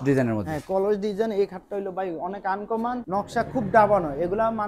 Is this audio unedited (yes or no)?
yes